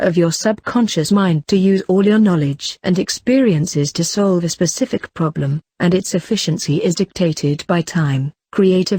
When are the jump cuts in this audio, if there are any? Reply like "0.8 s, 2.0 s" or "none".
none